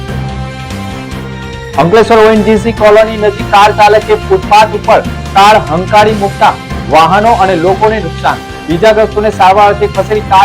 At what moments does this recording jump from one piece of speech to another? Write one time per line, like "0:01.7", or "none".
0:01.2